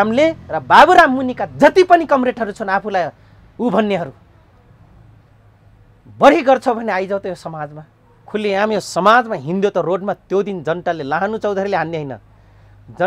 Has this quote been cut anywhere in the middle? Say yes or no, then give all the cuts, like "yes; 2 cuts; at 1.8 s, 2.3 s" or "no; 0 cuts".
no; 0 cuts